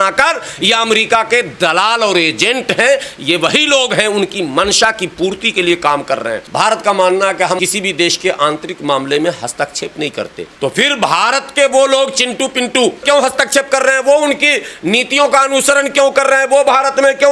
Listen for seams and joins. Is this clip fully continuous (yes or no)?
no